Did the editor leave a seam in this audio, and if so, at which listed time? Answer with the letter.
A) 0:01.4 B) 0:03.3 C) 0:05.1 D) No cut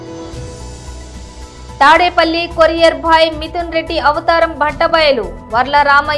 A